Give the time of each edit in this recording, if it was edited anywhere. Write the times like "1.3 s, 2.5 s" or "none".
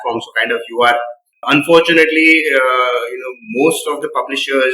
1.3 s